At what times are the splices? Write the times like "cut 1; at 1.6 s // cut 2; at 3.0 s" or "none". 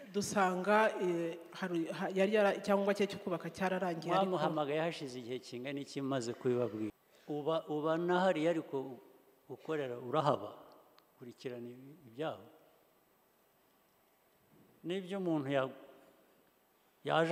cut 1; at 7.1 s